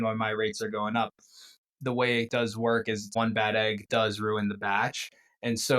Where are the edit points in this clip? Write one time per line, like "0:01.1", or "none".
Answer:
0:01.5
0:03.1